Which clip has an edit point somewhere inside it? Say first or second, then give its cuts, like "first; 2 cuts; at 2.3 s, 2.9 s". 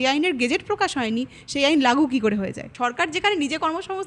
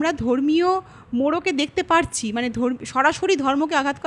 first; 1 cut; at 2.7 s